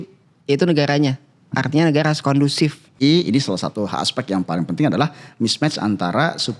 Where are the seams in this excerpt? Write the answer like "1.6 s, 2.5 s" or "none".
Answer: 2.9 s